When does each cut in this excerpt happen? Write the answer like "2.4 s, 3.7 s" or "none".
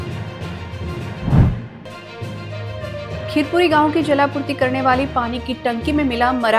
1.7 s